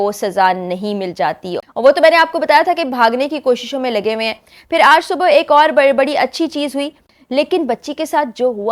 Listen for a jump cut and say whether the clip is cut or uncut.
cut